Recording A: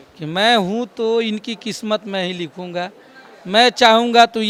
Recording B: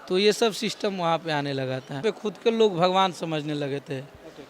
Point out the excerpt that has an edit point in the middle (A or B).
B